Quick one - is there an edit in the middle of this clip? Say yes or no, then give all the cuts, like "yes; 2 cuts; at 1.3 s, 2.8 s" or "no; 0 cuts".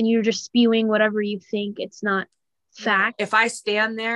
yes; 1 cut; at 3.1 s